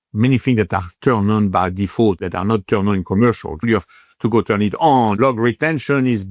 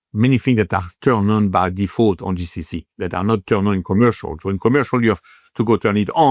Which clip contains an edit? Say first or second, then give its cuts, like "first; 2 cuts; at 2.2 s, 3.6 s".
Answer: first; 3 cuts; at 2.2 s, 3.6 s, 5.2 s